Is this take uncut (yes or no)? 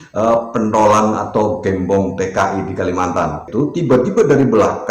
no